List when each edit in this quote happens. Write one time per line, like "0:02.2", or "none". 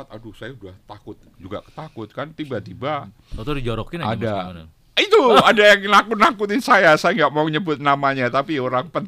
none